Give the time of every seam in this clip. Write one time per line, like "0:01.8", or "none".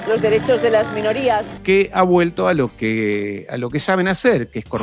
0:01.6